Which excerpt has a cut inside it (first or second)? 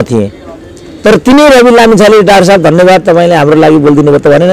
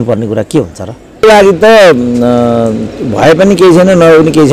second